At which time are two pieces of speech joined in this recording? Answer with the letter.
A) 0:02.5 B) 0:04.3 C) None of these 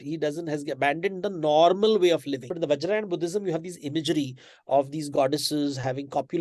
A